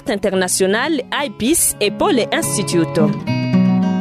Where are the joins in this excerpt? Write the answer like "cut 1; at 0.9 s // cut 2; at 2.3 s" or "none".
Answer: cut 1; at 3.0 s